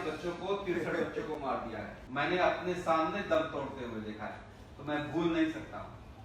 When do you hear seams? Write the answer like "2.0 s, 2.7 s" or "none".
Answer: 2.0 s